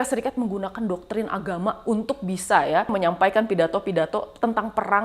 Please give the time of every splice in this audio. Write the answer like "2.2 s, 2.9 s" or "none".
2.9 s